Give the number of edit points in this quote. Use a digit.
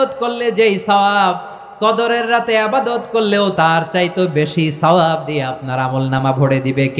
1